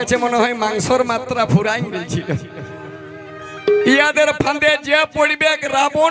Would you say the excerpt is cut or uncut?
cut